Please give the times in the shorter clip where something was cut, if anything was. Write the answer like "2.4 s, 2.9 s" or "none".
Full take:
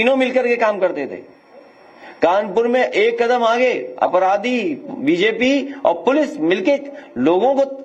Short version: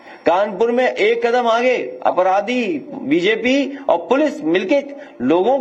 none